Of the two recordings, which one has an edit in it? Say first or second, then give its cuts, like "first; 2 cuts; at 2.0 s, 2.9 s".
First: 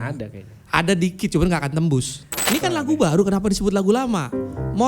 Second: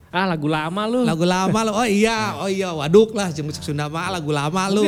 first; 1 cut; at 2.3 s